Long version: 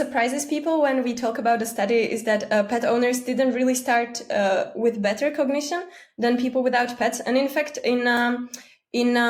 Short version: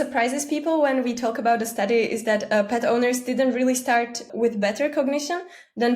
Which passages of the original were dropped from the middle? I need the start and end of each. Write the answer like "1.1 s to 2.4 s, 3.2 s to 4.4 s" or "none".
4.3 s to 4.7 s